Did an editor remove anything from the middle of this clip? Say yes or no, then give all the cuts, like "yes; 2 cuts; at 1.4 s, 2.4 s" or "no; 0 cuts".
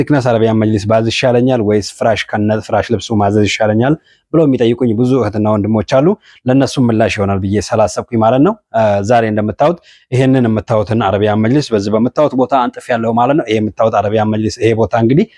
no; 0 cuts